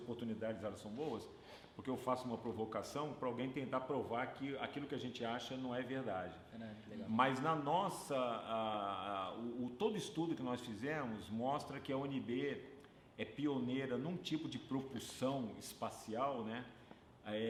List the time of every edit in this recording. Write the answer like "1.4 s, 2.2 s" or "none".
none